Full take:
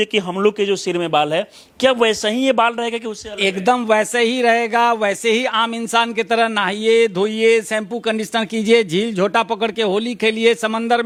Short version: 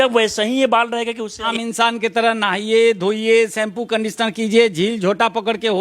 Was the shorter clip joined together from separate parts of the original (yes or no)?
yes